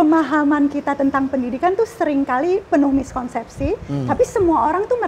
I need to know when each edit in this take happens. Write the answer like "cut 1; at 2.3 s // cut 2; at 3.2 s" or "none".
none